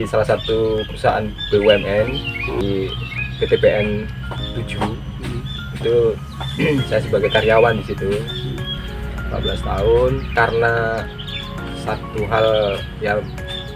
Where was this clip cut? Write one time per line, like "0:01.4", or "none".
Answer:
0:02.6
0:08.8
0:10.3